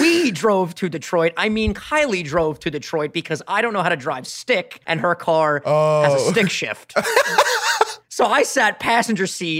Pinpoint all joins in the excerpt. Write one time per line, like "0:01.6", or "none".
0:04.8
0:08.0